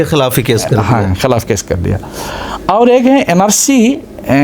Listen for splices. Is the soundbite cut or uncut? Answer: uncut